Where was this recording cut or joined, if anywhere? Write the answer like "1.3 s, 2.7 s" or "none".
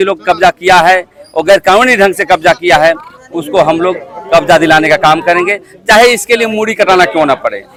none